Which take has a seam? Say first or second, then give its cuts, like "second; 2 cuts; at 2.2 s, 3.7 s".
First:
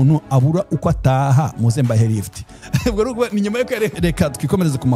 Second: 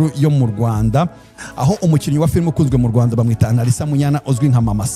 first; 1 cut; at 3.9 s